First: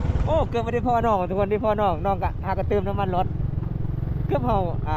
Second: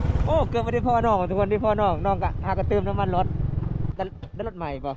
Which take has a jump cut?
second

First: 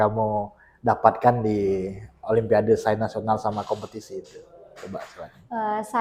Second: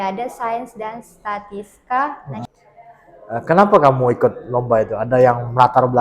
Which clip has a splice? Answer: second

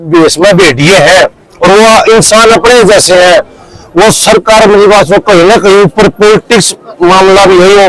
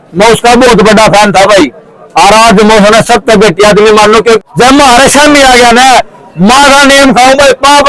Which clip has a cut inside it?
second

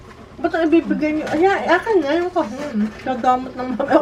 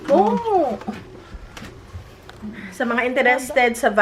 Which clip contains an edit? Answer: second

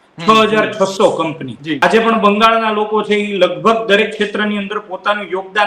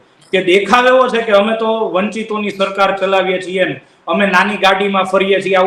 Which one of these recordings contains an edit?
first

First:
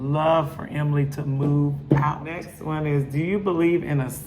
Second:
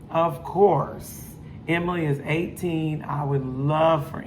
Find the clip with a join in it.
first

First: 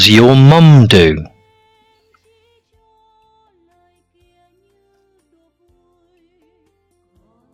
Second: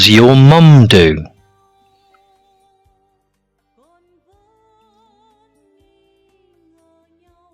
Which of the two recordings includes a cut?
second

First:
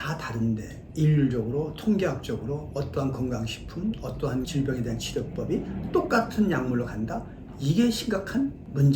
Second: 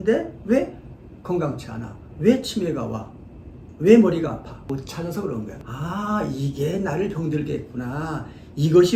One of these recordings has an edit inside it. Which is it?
second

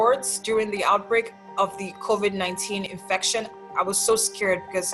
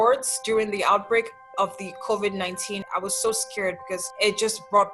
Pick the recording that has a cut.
second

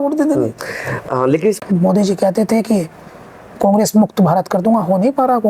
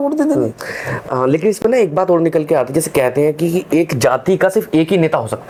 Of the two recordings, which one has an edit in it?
first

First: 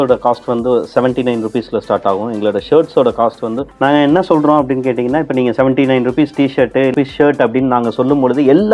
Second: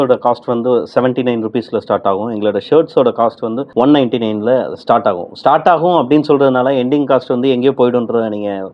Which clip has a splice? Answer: first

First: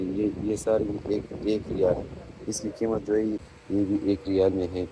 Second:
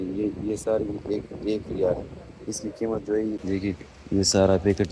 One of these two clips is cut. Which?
second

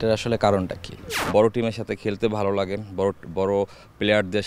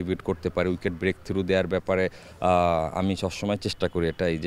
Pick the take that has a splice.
first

